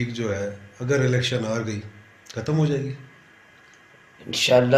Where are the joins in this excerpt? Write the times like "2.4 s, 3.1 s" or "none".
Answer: none